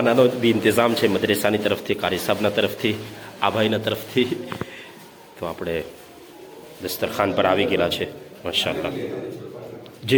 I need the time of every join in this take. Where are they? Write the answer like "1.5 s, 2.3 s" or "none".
none